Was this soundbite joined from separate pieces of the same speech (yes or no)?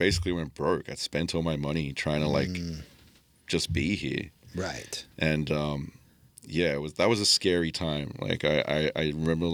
no